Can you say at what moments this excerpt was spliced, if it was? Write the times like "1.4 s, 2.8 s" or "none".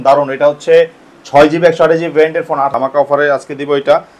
2.7 s